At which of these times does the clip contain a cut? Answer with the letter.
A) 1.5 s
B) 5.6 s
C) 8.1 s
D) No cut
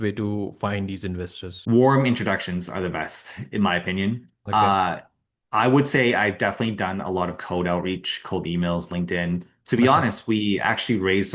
A